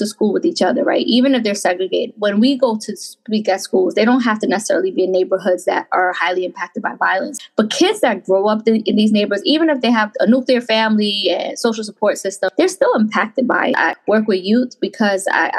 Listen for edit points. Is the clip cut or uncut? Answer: cut